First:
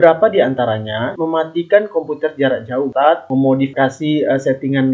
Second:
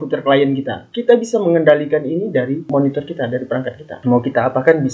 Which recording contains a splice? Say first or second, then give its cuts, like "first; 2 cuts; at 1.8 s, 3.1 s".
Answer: first; 2 cuts; at 1.1 s, 2.9 s